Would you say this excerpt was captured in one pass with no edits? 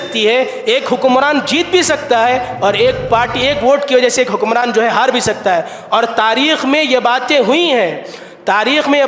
yes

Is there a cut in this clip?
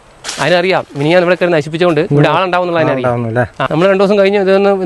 yes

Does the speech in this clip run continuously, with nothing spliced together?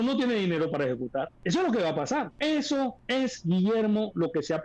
no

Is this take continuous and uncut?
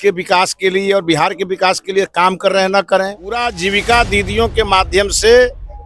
no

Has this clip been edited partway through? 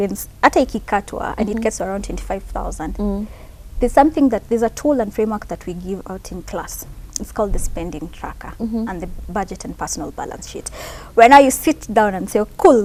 no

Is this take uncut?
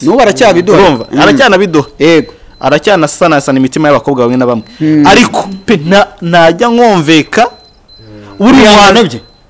yes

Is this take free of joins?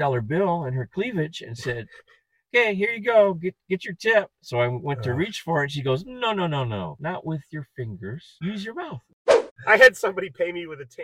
no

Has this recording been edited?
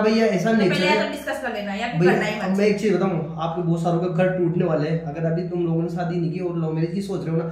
no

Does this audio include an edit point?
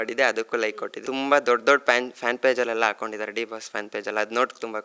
yes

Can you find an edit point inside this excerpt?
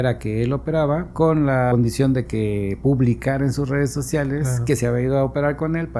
yes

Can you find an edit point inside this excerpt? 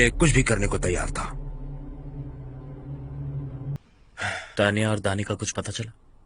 yes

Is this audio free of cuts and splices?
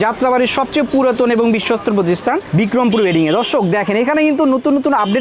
yes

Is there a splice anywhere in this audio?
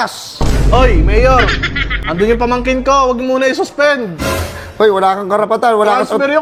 no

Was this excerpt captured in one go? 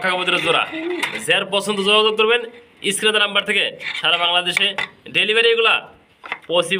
yes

